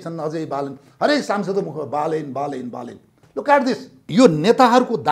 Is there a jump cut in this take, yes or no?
yes